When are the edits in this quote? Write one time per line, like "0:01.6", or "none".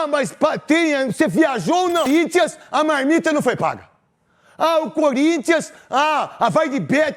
0:02.1